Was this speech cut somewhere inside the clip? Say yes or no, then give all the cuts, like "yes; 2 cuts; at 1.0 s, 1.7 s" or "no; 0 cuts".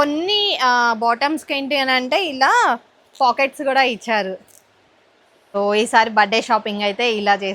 yes; 1 cut; at 5.6 s